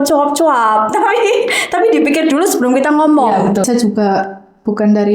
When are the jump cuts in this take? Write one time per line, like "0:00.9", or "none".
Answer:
0:03.6